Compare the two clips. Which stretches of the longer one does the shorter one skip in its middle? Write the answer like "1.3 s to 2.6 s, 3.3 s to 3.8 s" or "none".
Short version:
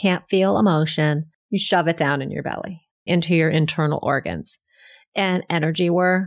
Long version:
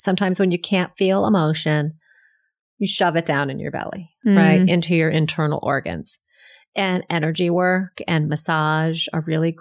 2.0 s to 2.6 s, 4.3 s to 4.6 s